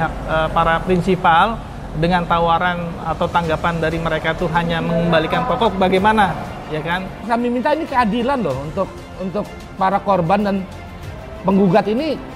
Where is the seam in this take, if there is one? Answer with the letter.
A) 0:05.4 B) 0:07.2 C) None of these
B